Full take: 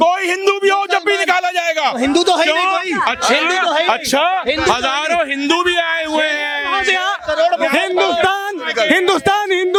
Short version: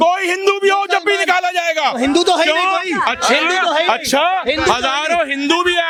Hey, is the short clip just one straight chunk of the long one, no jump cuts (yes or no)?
yes